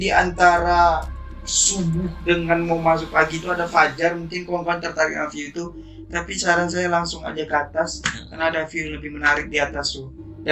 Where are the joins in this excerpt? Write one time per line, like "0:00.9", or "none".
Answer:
none